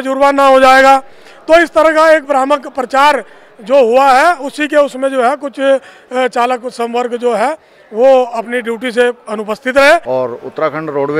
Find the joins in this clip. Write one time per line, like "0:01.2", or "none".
0:10.0